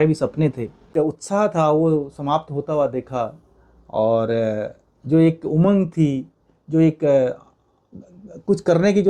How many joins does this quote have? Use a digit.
1